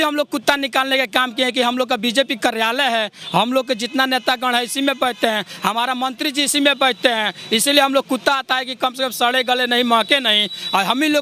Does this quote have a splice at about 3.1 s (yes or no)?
no